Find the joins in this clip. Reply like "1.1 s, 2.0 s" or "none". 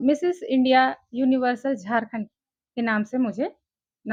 none